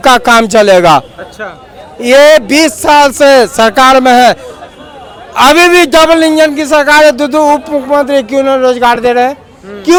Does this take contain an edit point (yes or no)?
no